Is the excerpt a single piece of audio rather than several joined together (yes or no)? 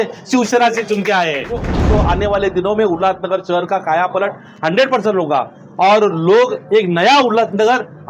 no